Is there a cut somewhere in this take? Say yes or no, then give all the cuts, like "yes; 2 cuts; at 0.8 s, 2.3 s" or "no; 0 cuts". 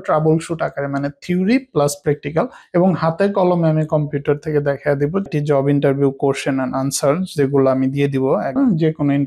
yes; 3 cuts; at 2.6 s, 5.3 s, 8.6 s